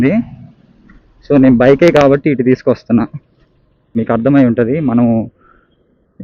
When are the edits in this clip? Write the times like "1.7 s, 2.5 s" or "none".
4.0 s